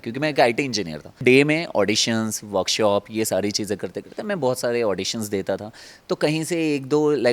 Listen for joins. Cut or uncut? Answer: cut